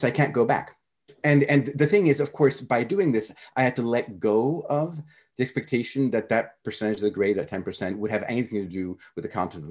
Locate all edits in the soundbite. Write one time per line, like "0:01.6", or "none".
0:01.1